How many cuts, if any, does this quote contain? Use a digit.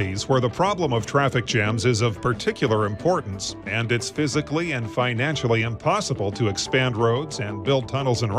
0